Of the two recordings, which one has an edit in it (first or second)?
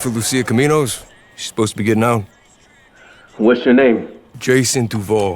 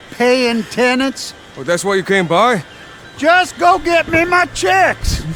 first